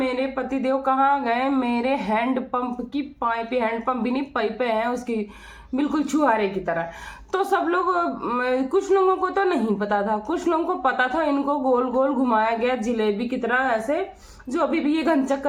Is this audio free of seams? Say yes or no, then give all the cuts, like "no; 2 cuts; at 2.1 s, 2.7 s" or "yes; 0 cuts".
yes; 0 cuts